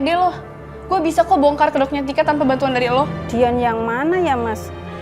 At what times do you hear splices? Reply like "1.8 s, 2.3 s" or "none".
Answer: 3.2 s

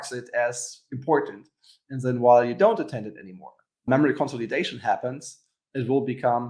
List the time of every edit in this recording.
3.9 s

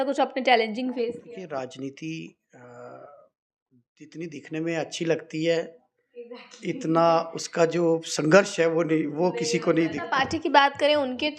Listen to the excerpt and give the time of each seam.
1.2 s, 10.0 s

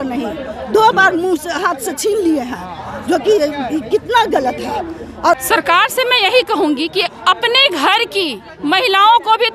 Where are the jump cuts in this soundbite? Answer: 5.4 s

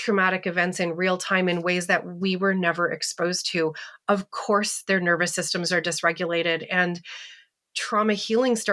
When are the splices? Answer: none

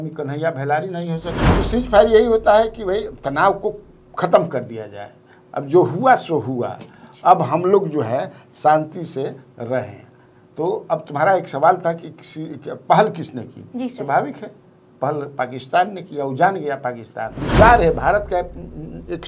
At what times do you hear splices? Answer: 1.4 s, 17.4 s

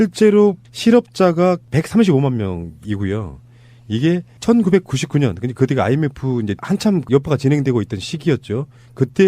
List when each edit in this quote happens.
none

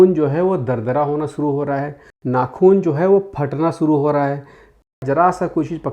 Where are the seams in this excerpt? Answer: 2.1 s, 5.0 s

